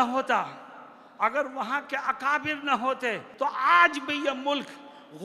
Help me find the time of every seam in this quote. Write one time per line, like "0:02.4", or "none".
0:03.2